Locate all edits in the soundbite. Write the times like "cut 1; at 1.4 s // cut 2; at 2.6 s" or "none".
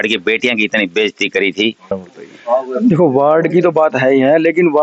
cut 1; at 2.0 s